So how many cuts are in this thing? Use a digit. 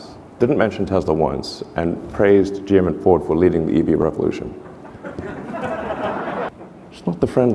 2